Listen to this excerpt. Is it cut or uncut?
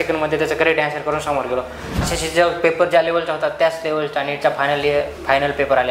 cut